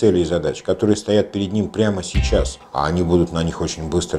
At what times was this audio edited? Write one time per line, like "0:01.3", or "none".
0:02.6